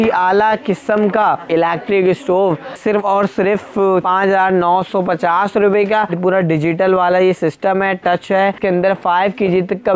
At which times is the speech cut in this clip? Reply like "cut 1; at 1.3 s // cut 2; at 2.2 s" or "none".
cut 1; at 1.5 s // cut 2; at 2.8 s // cut 3; at 4.1 s // cut 4; at 6.1 s // cut 5; at 8.6 s